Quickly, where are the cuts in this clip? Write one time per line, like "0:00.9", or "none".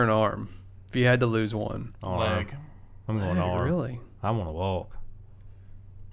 none

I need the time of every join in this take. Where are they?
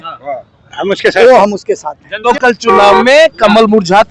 0:02.2

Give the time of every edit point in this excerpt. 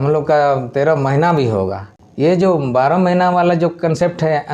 0:01.9

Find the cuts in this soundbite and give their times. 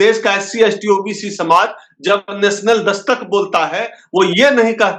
none

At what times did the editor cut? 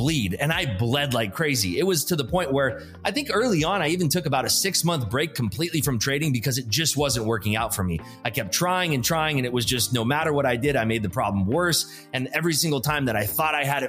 none

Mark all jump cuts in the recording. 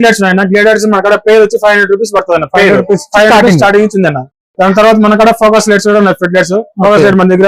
none

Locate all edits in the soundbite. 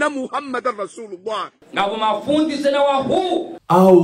0:01.6

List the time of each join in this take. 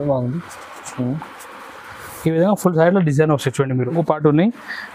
0:03.9

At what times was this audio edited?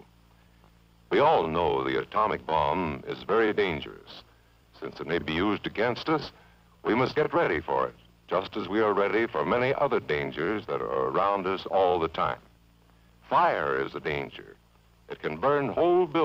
none

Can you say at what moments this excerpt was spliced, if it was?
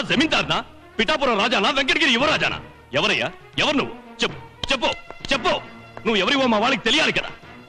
none

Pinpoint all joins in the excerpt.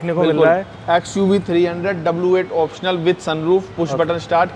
none

